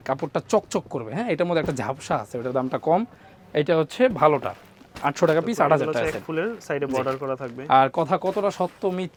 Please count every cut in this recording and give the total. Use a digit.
0